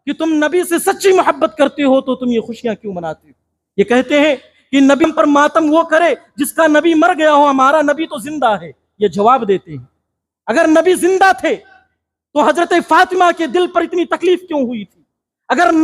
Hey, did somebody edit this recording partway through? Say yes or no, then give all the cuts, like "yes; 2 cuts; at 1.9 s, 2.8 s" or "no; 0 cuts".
yes; 1 cut; at 5.0 s